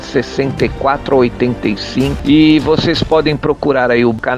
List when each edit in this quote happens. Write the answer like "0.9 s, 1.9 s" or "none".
2.2 s

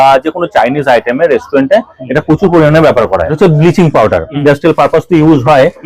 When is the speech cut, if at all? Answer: 3.3 s, 4.3 s

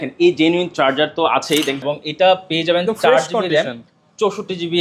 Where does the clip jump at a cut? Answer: 1.8 s

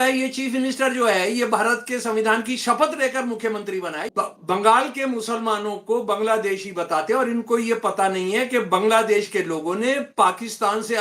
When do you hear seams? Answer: 4.0 s

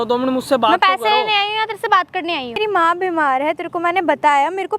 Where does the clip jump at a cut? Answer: 2.6 s

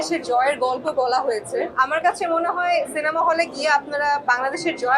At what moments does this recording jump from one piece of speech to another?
1.7 s

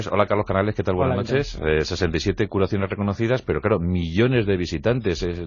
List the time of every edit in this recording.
none

